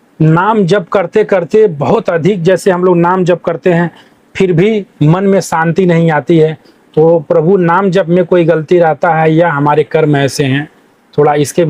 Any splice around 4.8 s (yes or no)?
no